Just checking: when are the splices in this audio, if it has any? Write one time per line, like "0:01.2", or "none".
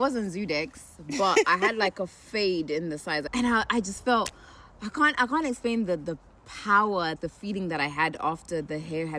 0:03.2
0:07.2